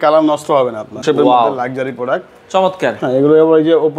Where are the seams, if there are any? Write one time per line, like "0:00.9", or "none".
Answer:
0:01.0